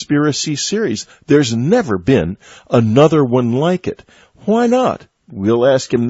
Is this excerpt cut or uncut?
uncut